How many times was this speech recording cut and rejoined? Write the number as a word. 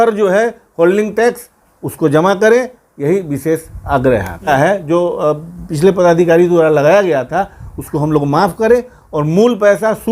one